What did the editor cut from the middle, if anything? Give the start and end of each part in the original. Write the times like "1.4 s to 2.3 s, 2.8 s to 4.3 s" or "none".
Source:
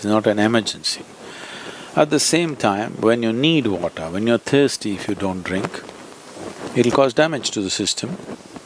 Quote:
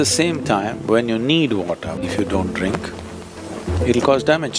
4.2 s to 4.9 s